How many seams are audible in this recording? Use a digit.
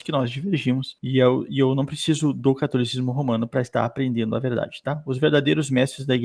0